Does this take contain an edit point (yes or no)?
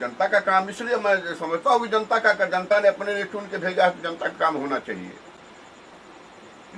no